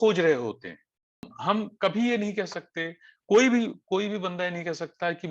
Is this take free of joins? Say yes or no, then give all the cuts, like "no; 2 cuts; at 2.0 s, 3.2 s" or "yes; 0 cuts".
no; 1 cut; at 1.3 s